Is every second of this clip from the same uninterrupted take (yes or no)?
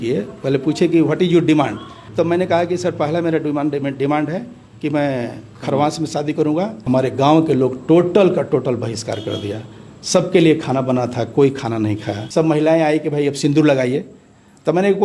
no